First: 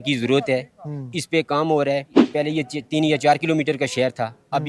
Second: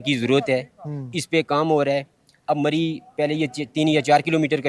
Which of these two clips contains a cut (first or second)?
first